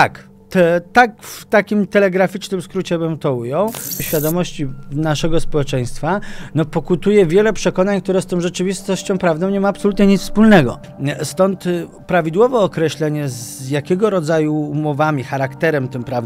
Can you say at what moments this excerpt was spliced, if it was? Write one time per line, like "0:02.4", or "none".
0:04.0
0:10.9